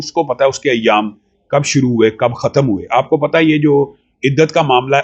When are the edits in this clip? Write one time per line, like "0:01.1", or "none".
none